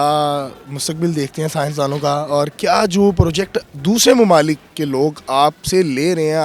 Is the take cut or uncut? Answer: uncut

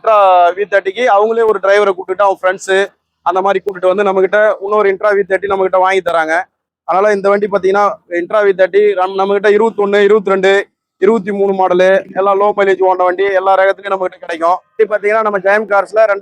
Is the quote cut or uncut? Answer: cut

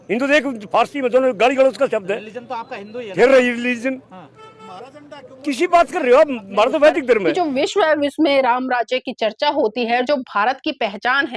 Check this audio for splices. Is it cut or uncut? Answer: cut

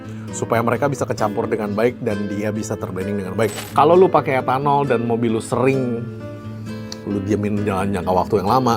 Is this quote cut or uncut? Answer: cut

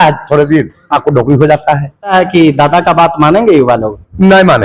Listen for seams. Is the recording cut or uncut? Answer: cut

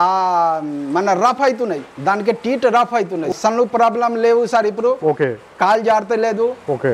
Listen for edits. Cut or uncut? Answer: cut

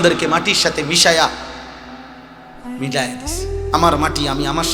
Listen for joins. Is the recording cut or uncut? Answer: uncut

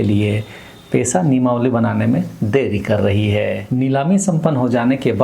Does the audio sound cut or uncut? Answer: cut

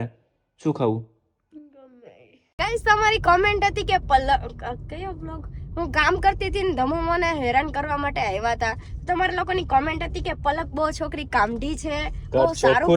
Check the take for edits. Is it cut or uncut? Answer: cut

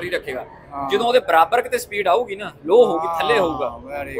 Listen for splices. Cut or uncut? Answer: uncut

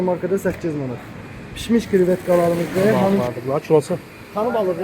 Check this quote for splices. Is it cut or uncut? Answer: cut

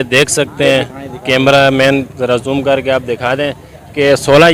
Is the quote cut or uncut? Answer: uncut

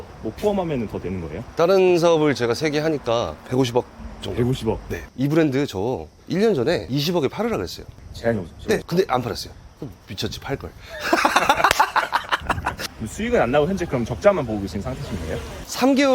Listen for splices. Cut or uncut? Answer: cut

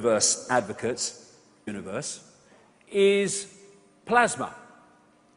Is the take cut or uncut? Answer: uncut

